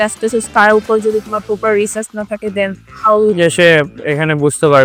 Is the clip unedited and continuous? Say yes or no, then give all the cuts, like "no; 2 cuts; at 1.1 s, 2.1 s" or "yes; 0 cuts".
yes; 0 cuts